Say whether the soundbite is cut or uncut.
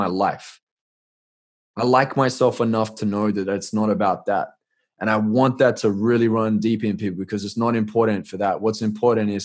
uncut